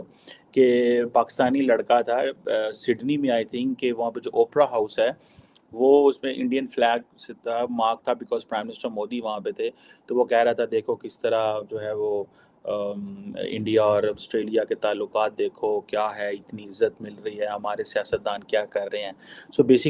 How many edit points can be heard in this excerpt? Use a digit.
0